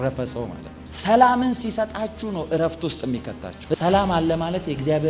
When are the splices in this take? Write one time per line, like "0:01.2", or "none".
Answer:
0:03.7